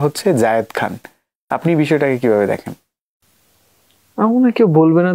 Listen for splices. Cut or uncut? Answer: uncut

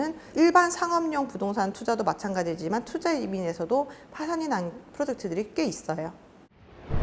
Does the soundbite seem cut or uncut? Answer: uncut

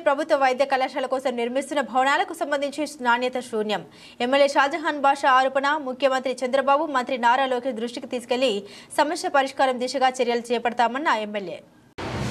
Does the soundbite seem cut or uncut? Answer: uncut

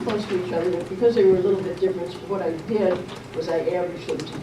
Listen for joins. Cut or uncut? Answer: cut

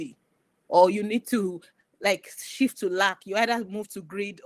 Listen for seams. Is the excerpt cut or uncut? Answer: uncut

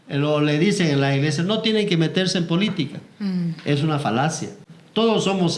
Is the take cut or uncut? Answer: uncut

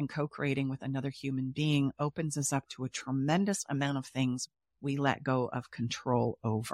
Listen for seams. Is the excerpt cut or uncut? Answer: uncut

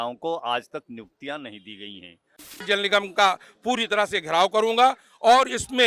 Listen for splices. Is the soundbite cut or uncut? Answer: cut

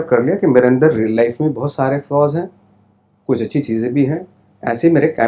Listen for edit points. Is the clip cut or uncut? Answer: uncut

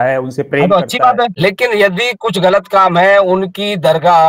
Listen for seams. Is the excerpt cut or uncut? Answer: cut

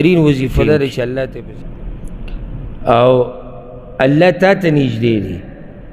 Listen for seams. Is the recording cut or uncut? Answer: cut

